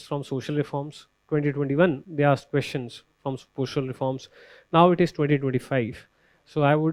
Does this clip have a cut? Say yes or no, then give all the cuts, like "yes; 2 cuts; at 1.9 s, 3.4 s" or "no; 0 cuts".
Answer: no; 0 cuts